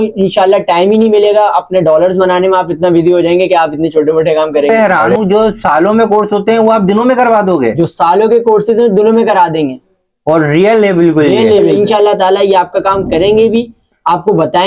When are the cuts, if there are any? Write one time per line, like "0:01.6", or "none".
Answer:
0:04.7
0:11.7